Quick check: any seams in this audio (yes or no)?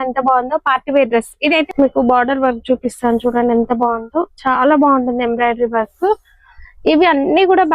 yes